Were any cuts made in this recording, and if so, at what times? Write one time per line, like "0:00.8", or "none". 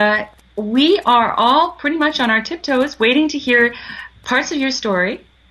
0:03.3

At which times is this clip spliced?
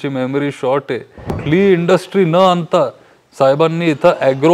0:01.4

